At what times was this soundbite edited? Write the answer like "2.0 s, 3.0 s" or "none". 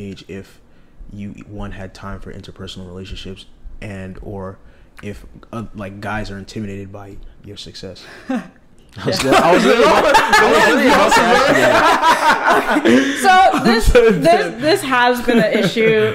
none

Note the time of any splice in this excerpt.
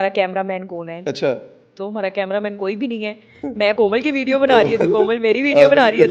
none

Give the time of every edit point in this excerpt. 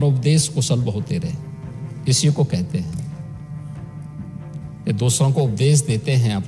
none

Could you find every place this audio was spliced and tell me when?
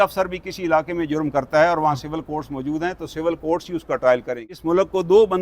4.5 s

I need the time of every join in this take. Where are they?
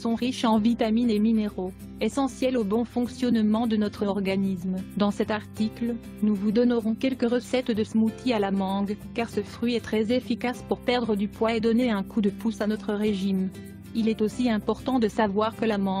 6.5 s

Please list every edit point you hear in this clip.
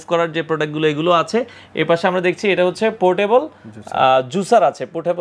none

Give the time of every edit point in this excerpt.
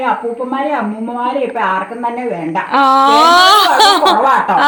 none

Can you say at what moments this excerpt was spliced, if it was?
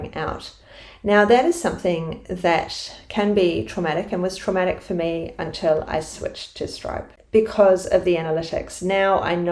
7.1 s

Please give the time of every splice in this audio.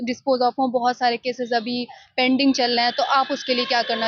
none

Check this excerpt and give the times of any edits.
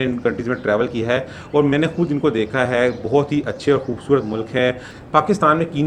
5.0 s

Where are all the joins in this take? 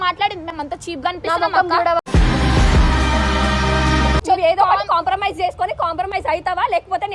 4.2 s

